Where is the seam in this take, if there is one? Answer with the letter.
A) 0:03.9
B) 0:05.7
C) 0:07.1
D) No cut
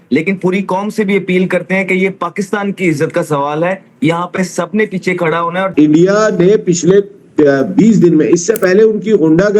B